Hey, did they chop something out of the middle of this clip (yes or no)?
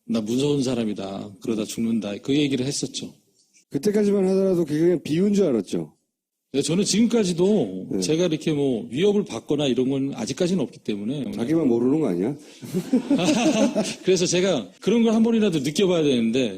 yes